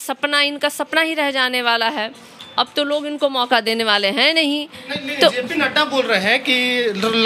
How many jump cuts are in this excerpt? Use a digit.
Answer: 0